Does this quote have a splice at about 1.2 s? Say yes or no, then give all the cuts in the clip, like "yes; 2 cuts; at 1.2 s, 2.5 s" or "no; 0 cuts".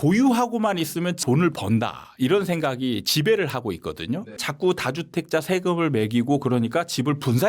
yes; 2 cuts; at 1.2 s, 4.3 s